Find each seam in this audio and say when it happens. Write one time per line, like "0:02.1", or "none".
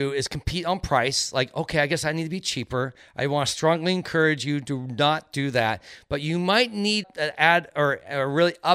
none